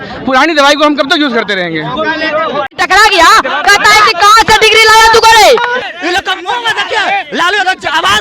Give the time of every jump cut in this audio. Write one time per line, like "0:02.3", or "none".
0:02.7
0:05.8